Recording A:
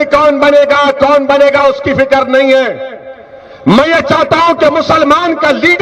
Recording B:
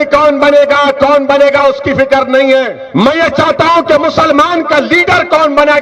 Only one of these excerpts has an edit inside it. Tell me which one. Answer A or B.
B